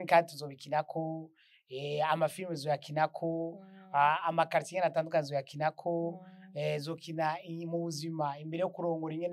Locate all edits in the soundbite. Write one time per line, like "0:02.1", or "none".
none